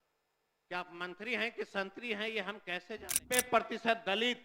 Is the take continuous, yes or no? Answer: no